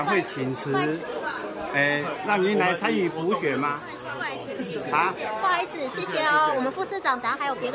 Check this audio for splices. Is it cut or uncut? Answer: uncut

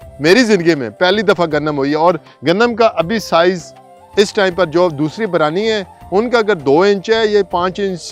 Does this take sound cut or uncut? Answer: uncut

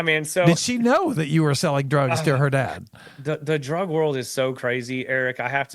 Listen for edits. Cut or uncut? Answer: uncut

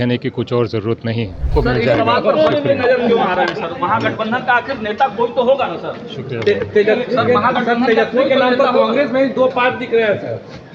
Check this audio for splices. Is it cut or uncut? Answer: cut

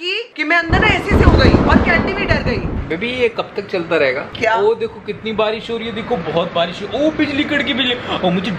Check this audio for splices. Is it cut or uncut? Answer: cut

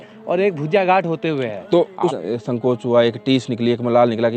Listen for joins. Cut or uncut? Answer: cut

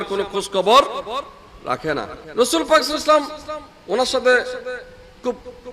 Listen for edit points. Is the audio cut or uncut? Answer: cut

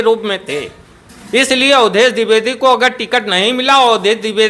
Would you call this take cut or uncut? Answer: uncut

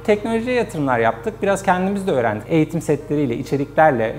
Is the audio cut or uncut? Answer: uncut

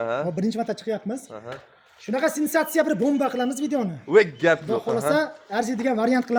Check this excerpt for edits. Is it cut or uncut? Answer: uncut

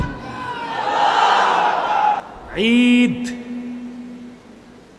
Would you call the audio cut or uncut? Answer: cut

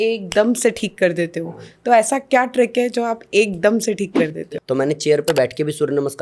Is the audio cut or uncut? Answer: cut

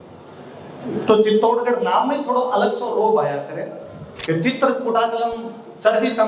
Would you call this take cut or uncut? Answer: cut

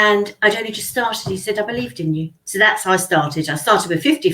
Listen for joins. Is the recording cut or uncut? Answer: cut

